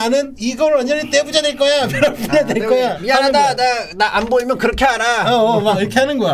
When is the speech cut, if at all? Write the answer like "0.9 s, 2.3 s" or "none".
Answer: none